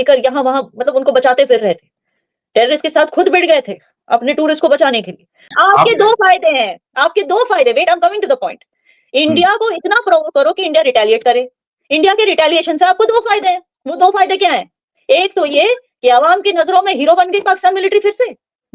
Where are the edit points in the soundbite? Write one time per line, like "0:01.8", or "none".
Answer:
0:05.5